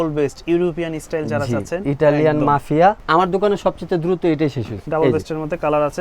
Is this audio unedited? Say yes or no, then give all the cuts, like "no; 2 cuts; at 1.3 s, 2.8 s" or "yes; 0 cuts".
no; 2 cuts; at 3.0 s, 4.8 s